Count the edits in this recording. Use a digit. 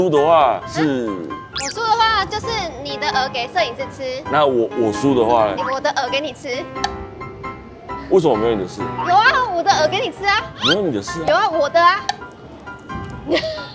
0